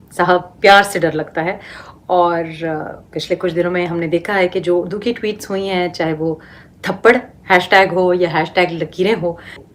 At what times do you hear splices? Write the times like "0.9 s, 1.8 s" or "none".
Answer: none